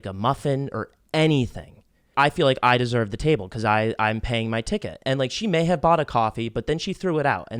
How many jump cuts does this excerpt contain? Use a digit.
1